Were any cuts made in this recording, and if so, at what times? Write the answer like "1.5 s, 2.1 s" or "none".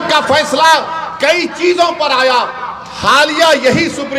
none